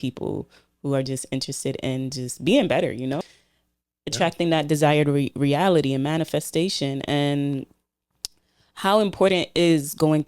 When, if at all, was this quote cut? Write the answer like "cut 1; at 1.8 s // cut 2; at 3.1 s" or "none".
cut 1; at 3.2 s